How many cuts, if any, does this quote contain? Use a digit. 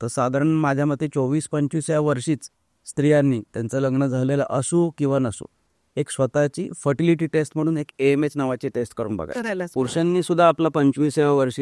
1